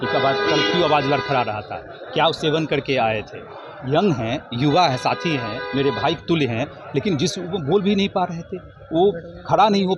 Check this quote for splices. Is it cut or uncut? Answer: uncut